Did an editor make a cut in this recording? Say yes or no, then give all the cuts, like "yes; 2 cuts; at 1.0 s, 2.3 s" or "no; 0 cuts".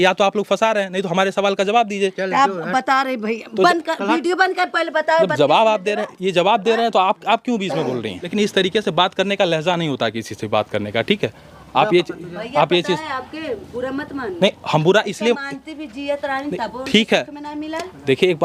no; 0 cuts